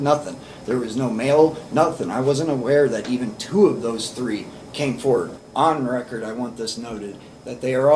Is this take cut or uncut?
cut